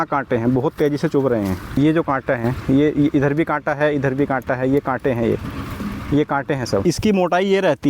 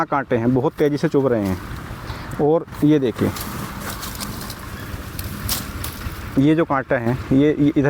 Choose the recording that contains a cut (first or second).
first